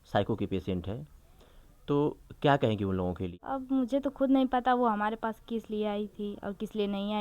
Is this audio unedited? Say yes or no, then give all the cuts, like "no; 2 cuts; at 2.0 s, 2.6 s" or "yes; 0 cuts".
no; 1 cut; at 3.3 s